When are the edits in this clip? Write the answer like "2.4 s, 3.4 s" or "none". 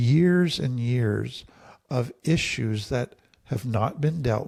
none